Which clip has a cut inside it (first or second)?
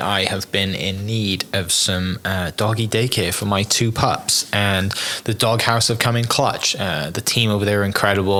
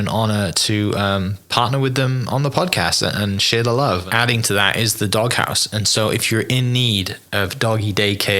second